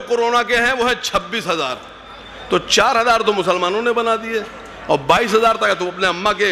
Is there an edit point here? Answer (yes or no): no